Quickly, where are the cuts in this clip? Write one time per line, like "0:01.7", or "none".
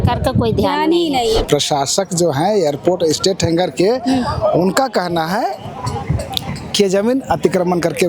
0:01.4